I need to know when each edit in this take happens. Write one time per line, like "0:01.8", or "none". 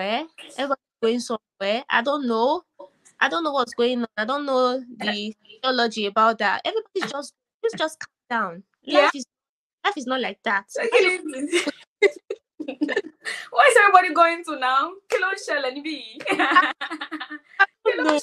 none